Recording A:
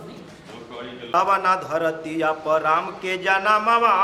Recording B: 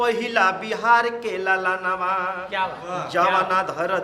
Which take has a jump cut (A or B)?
A